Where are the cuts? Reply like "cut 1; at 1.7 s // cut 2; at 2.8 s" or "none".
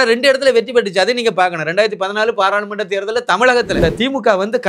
cut 1; at 3.8 s

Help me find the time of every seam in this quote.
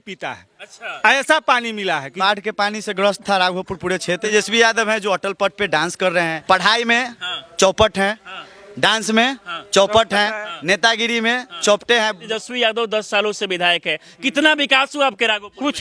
cut 1; at 2.1 s // cut 2; at 4.3 s // cut 3; at 6.4 s // cut 4; at 12.2 s

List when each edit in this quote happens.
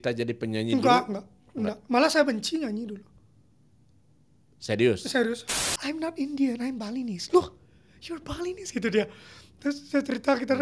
cut 1; at 5.4 s

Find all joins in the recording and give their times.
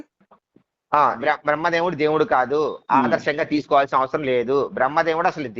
cut 1; at 1.1 s

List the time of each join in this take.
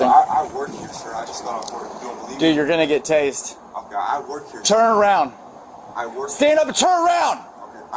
cut 1; at 2.0 s // cut 2; at 5.7 s

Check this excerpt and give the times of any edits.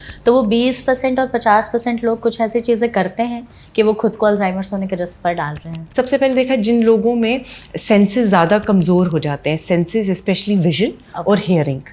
cut 1; at 5.8 s

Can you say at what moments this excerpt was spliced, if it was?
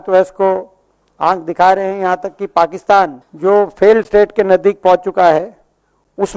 cut 1; at 3.2 s

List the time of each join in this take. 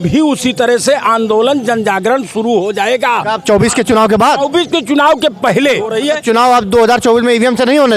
cut 1; at 5.9 s

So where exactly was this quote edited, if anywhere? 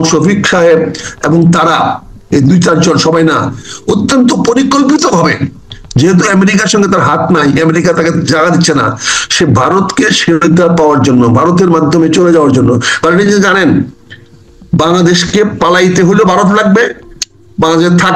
none

